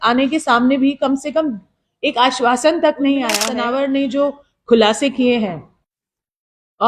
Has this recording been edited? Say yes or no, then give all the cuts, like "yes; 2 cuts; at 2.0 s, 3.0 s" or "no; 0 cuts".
yes; 1 cut; at 3.5 s